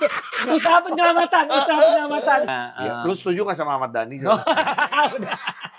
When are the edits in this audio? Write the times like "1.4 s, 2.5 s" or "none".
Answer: 2.5 s

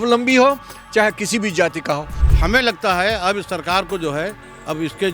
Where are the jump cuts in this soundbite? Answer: 2.2 s

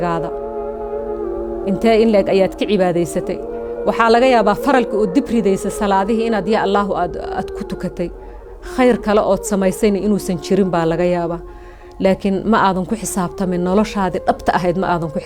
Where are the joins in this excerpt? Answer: none

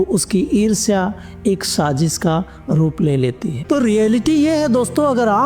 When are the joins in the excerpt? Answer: 3.6 s

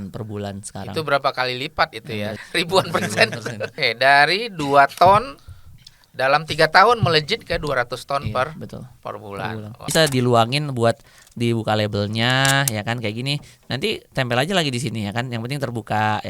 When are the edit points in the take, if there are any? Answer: 2.4 s, 3.7 s, 9.8 s

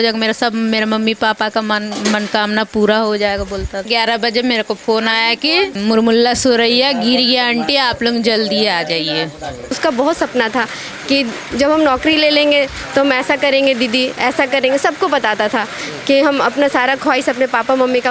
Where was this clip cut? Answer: 3.9 s, 5.8 s, 9.8 s

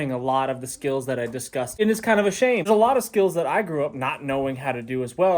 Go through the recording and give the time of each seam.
1.7 s, 2.7 s

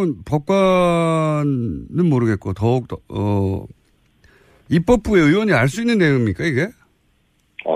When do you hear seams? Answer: 1.5 s

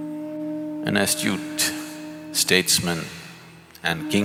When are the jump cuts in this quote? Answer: none

